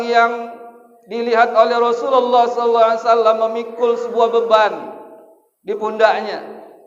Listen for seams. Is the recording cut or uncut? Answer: uncut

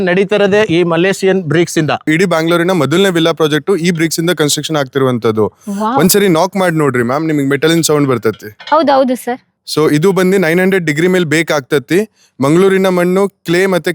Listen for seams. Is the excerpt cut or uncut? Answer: cut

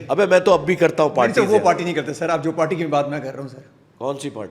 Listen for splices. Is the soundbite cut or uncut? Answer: uncut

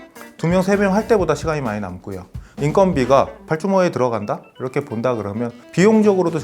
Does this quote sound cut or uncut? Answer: cut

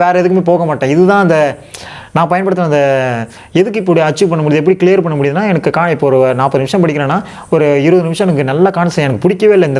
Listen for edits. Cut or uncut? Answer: uncut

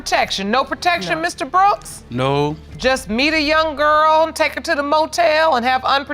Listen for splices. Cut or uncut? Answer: uncut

